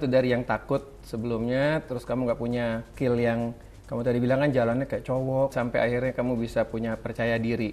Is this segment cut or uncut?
cut